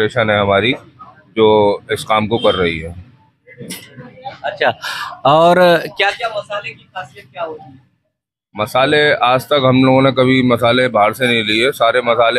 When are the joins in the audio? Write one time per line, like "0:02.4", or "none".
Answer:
none

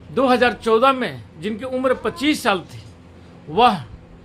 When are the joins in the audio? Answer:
none

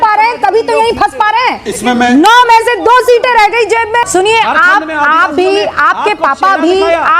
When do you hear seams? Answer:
0:04.1

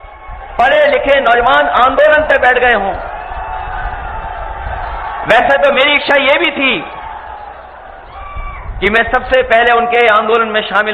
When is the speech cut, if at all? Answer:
none

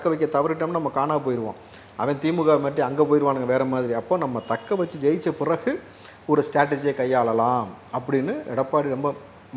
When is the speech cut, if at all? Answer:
none

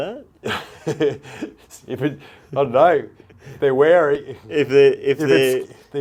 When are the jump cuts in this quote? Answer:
none

